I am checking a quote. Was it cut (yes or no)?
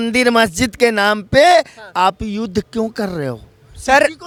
no